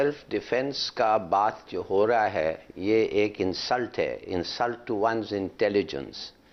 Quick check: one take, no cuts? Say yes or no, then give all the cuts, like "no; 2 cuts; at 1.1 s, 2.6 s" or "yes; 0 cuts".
yes; 0 cuts